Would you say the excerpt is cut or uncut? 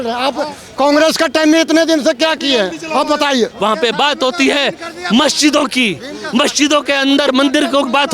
cut